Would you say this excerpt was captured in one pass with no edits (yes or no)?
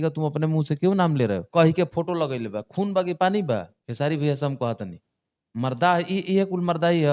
no